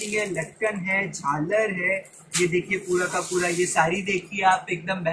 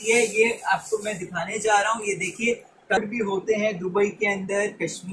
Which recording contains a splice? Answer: second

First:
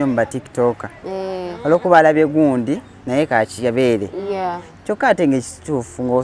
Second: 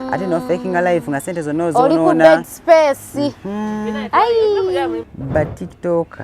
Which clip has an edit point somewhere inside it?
second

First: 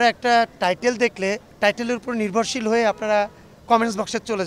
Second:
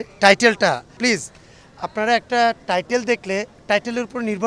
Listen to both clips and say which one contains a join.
second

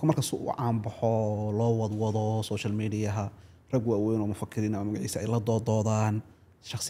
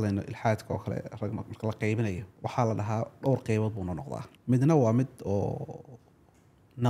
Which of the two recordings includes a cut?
second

